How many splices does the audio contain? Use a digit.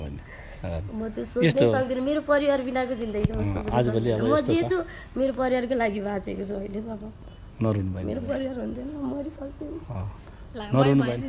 0